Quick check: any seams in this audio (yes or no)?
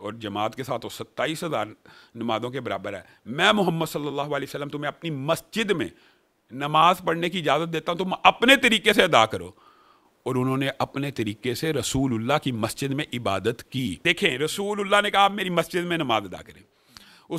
yes